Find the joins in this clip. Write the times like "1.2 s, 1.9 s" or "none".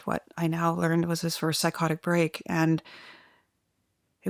none